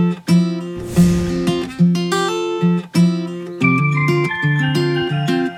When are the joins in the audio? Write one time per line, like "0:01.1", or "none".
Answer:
none